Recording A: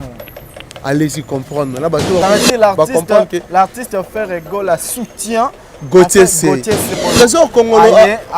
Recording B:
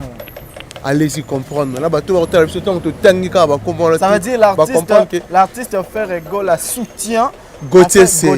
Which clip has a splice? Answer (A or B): A